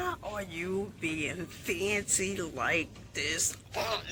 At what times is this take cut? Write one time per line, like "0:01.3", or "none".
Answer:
none